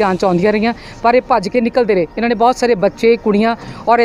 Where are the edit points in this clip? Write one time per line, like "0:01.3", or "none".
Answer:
none